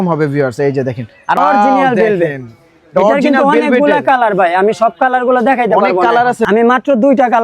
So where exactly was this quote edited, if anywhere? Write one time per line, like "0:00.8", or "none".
0:01.4
0:06.4